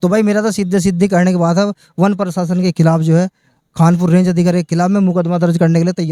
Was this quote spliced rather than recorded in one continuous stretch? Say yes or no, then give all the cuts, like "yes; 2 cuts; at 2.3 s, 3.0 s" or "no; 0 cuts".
no; 0 cuts